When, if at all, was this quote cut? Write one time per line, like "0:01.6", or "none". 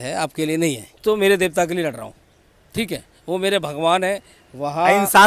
0:00.9